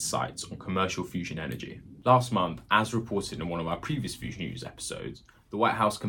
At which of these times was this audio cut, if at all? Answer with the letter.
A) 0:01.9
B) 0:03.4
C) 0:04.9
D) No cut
D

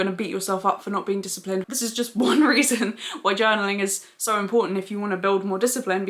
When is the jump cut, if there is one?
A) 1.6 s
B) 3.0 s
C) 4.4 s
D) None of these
A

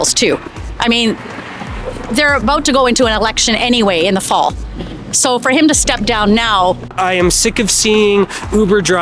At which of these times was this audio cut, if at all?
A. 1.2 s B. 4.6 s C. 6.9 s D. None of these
C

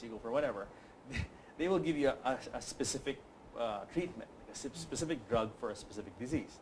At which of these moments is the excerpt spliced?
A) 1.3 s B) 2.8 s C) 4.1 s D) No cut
D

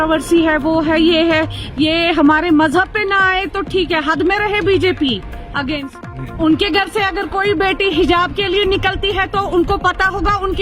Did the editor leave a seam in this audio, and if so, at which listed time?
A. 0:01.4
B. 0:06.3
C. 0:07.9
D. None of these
B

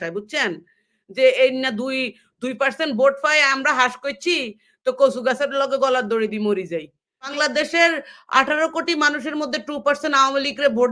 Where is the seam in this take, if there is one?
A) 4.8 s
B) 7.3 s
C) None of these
B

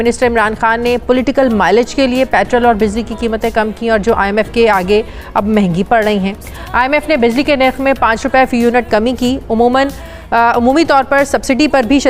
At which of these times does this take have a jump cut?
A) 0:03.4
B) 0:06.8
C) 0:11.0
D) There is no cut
D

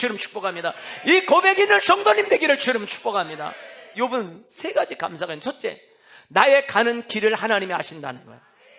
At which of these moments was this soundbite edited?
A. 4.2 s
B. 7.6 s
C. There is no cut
A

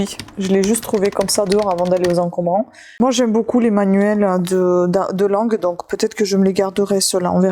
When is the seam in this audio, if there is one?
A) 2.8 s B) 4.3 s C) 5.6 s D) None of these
A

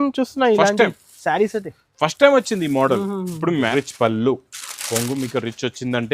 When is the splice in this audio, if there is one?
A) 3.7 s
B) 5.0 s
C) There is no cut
A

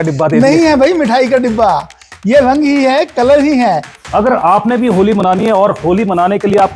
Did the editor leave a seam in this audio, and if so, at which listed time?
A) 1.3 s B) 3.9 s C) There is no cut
B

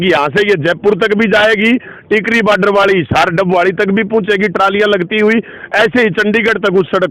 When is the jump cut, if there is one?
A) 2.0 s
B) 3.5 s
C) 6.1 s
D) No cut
D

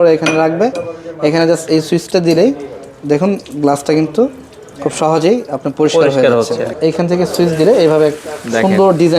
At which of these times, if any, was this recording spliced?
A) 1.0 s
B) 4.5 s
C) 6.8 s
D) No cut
C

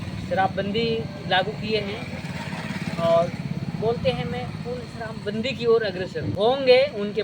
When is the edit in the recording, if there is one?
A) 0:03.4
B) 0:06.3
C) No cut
B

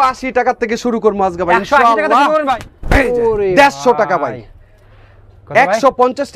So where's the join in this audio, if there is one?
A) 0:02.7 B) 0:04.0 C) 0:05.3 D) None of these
A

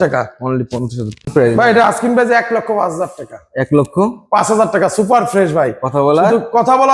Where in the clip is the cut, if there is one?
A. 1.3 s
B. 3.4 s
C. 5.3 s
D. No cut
A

